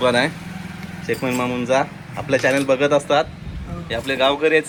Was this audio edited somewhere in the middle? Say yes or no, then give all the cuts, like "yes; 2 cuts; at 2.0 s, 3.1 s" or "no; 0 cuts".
no; 0 cuts